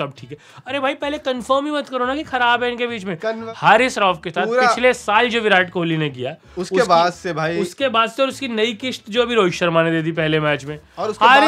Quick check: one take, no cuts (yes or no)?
no